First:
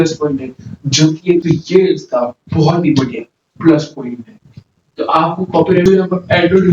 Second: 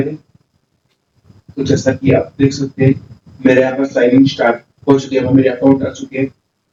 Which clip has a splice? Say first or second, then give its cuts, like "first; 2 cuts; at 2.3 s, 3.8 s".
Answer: first; 2 cuts; at 1.4 s, 5.9 s